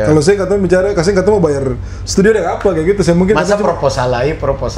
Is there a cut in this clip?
no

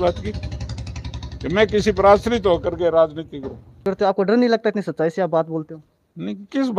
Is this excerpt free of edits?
no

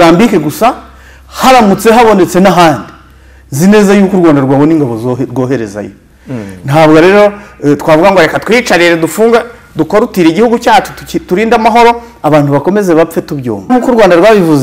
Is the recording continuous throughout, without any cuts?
no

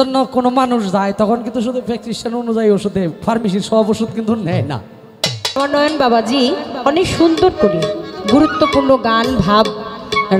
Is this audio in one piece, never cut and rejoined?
no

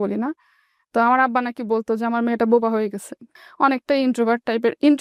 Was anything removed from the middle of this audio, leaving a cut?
no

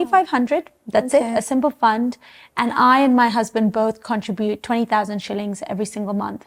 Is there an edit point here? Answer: no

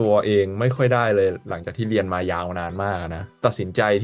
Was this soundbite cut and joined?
no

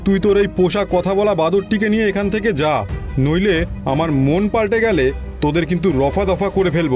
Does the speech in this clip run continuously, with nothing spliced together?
yes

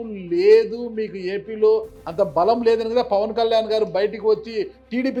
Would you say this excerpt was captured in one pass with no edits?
yes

